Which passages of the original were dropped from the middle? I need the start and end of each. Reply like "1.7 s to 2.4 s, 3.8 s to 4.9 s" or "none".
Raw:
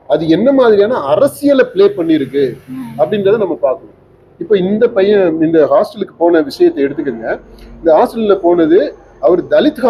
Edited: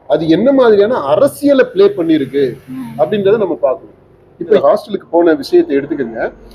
4.6 s to 5.7 s

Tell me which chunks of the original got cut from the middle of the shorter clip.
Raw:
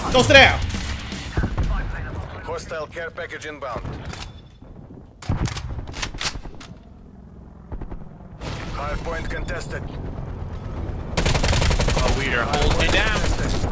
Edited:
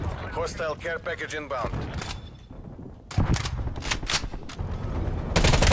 6.7 s to 10.4 s

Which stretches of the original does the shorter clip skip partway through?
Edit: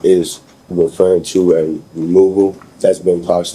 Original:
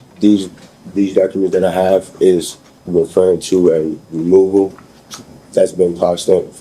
4.8 s to 5.4 s

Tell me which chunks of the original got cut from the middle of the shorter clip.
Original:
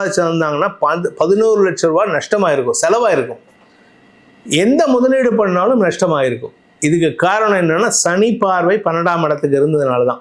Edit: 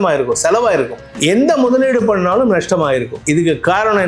3.4 s to 4.3 s, 6.4 s to 6.7 s

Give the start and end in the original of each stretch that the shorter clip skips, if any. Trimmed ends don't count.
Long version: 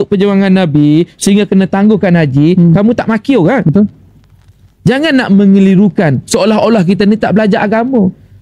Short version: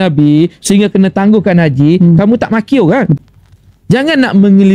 3.7 s to 4.1 s

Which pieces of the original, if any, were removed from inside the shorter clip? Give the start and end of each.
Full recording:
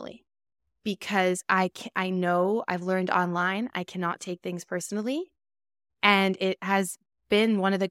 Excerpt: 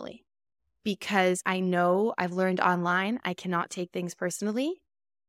1.4 s to 1.9 s

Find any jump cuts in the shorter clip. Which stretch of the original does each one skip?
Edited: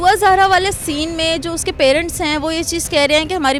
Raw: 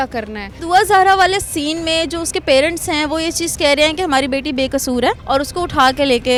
none

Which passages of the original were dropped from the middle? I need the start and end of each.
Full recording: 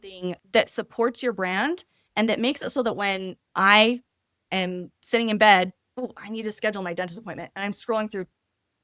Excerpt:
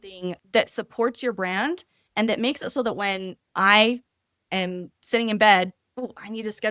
none

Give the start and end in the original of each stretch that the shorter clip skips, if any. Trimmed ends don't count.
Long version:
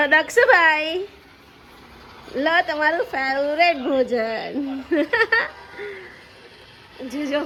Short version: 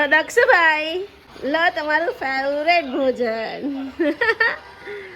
1.2 s to 2.1 s

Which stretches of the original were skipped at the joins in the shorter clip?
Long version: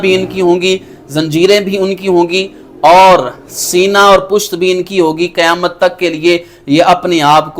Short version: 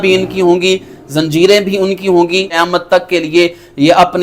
2.6 s to 5.5 s

